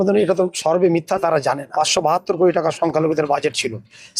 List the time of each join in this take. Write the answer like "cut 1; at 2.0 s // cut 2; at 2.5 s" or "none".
cut 1; at 1.7 s